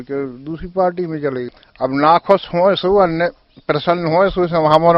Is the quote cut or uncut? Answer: cut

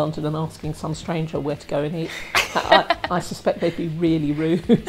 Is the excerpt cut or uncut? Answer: uncut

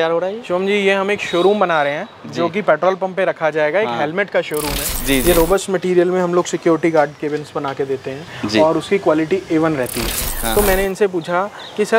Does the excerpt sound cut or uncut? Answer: cut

